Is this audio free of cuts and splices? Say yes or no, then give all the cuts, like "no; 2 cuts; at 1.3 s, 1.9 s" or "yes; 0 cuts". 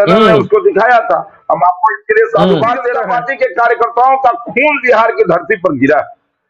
no; 1 cut; at 3.0 s